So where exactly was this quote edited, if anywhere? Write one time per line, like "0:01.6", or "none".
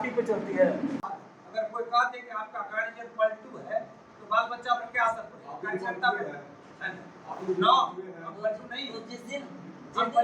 0:01.0